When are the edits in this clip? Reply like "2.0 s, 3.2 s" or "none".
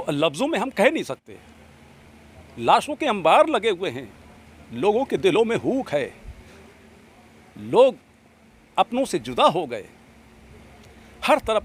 none